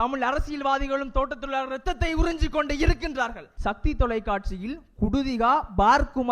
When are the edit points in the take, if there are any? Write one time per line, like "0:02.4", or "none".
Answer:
0:03.5